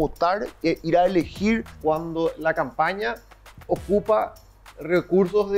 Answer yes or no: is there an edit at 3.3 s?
no